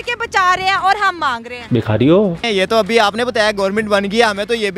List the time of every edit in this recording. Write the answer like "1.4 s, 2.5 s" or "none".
2.4 s